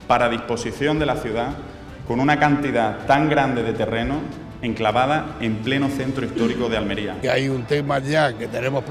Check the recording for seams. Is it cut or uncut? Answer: cut